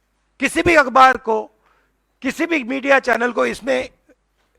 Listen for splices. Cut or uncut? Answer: uncut